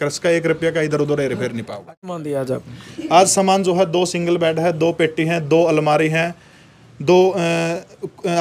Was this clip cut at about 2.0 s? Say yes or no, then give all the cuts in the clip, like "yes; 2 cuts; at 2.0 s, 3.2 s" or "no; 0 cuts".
yes; 1 cut; at 2.0 s